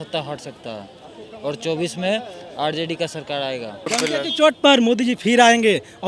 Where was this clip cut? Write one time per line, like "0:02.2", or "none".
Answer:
0:03.9